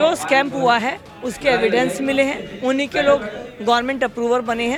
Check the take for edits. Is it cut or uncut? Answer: uncut